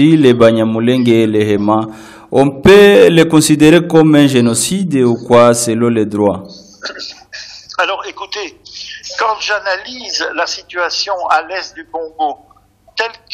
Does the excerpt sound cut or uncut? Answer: uncut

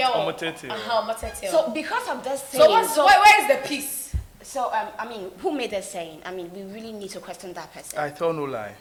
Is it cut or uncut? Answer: uncut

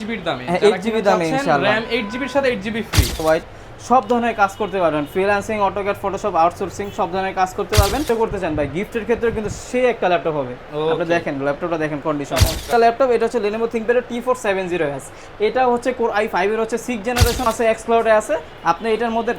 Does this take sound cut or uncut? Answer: cut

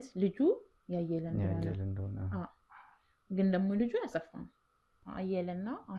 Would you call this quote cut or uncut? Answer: cut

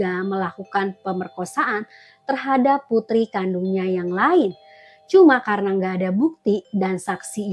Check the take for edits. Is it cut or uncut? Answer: uncut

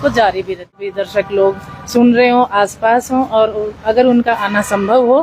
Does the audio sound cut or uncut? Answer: cut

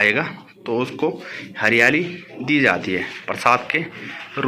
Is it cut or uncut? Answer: uncut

